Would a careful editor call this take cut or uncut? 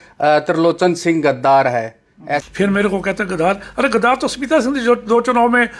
cut